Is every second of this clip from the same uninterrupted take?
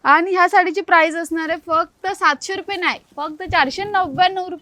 yes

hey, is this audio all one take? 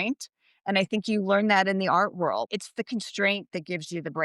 no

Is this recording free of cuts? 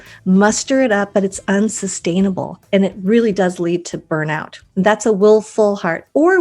no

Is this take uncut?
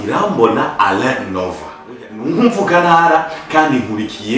no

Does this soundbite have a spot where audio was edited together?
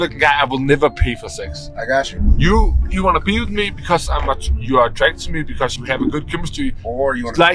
yes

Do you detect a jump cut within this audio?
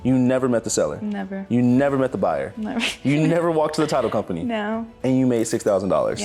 no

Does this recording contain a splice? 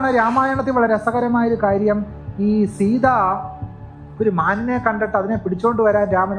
no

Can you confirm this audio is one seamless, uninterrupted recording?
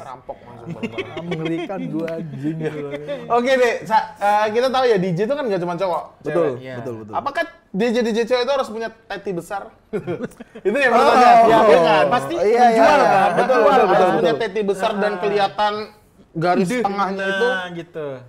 yes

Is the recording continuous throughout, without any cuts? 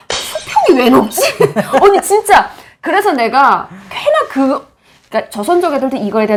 yes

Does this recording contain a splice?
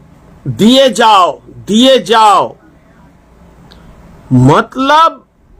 no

